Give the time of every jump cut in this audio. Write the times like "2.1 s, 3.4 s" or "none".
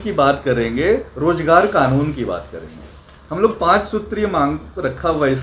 none